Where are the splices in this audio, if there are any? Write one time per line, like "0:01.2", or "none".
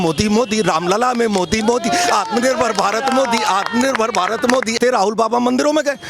0:04.8